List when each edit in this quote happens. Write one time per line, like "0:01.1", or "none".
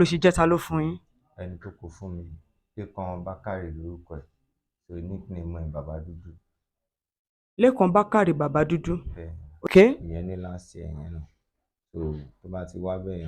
0:09.7